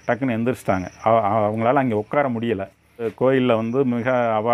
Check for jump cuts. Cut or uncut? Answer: cut